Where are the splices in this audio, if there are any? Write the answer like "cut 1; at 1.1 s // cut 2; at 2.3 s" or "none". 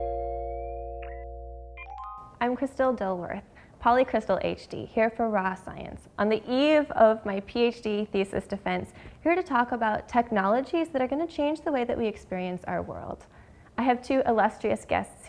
cut 1; at 2.2 s // cut 2; at 12.8 s